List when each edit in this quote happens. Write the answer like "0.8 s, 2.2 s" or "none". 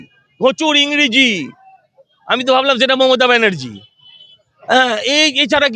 none